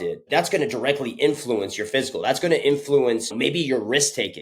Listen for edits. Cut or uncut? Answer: cut